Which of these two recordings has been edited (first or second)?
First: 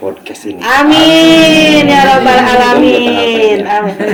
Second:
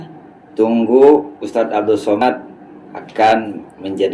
second